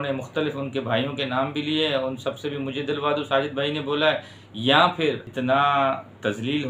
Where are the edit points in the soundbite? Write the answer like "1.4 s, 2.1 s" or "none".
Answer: 5.2 s